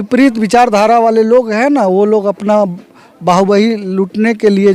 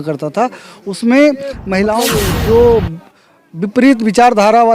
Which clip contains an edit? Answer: second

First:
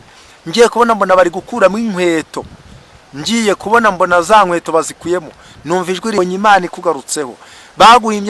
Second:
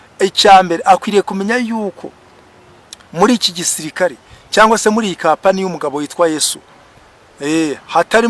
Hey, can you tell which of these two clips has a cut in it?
first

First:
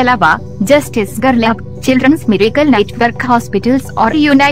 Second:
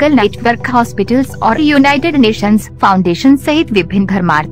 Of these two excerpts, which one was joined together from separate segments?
first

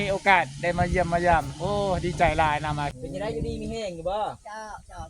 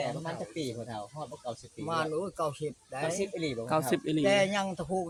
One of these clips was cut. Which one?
first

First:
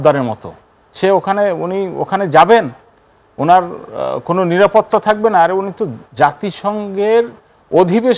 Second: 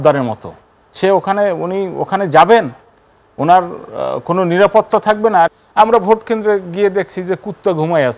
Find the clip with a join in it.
second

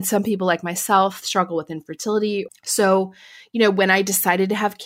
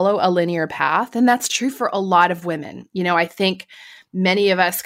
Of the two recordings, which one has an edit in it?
first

